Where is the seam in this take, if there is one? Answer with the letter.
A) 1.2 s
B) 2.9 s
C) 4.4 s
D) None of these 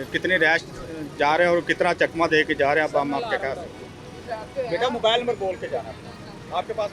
D